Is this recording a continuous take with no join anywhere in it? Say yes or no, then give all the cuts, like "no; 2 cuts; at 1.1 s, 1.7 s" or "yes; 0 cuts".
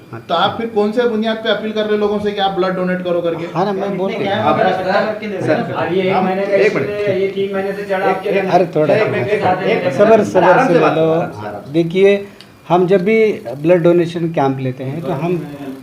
yes; 0 cuts